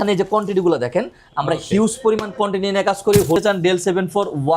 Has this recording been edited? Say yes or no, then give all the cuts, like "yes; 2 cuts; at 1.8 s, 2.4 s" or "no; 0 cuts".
yes; 1 cut; at 3.4 s